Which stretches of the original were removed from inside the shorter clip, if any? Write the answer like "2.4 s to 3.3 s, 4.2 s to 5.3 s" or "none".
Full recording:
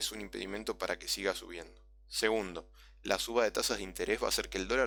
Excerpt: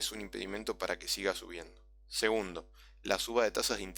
none